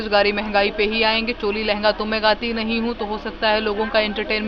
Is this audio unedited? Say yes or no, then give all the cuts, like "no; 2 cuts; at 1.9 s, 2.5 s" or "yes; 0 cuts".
yes; 0 cuts